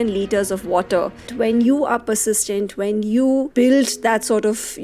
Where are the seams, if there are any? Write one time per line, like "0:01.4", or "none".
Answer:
0:01.3
0:03.5